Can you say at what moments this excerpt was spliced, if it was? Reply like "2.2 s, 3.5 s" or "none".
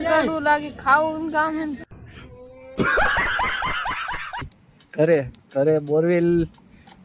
4.4 s